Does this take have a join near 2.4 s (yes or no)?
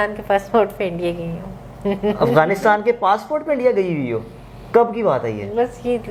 no